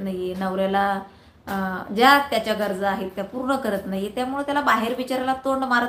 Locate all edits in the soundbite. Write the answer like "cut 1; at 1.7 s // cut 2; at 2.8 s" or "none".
none